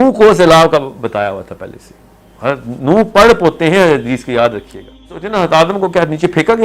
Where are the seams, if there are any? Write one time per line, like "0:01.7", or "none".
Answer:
0:05.2